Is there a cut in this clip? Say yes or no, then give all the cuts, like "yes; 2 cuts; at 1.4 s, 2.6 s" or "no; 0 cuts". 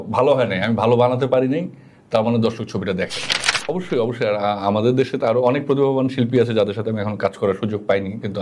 yes; 1 cut; at 3.7 s